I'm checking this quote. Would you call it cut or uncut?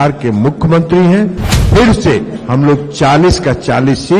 cut